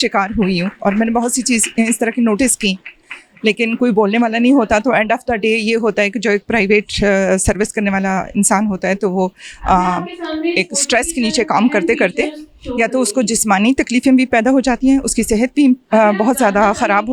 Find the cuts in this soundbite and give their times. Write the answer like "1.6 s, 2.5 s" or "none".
none